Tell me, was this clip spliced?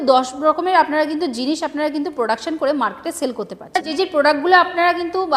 yes; 1 cut; at 3.9 s

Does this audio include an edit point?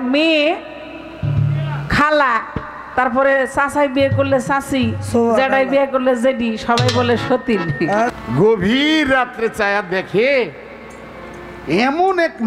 yes; 1 cut; at 8.1 s

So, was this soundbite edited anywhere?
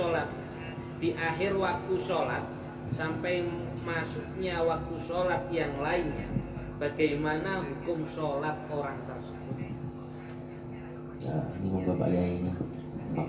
no; 0 cuts

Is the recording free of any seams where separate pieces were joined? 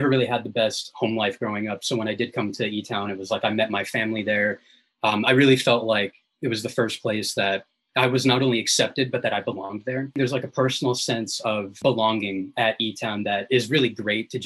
no; 2 cuts; at 10.2 s, 11.8 s

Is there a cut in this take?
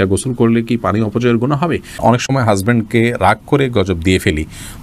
yes; 1 cut; at 2.2 s

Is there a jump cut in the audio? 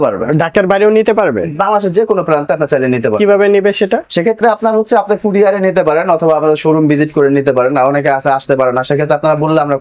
no; 0 cuts

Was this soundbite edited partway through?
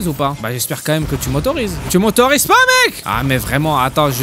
yes; 1 cut; at 1.9 s

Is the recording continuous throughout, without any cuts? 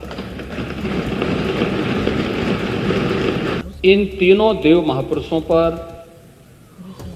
no; 1 cut; at 3.6 s

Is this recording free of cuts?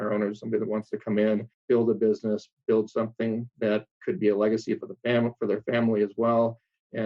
no; 2 cuts; at 1.5 s, 3.9 s

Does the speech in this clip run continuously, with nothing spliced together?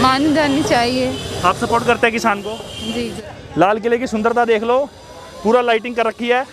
no; 1 cut; at 3.1 s

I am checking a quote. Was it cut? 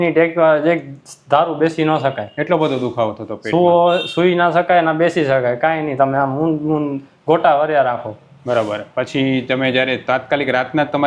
no; 0 cuts

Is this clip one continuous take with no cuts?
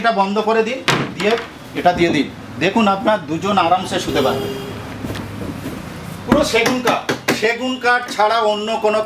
yes; 0 cuts

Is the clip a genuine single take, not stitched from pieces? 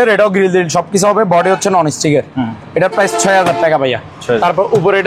yes; 0 cuts

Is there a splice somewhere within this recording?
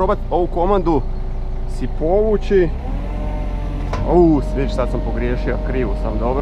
no; 0 cuts

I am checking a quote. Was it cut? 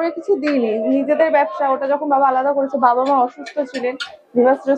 no; 0 cuts

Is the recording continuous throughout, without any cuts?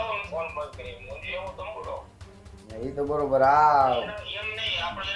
yes; 0 cuts

